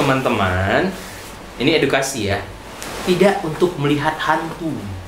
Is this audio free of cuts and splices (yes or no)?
yes